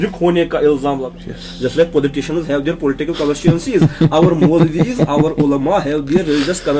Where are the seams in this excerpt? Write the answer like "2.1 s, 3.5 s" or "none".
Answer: 1.1 s